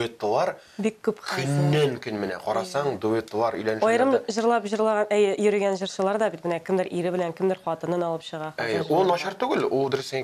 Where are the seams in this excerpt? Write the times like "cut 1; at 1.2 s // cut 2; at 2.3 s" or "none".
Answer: none